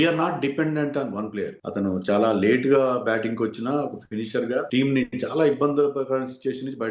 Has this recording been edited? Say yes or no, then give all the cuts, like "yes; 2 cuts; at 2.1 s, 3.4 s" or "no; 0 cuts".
yes; 1 cut; at 1.6 s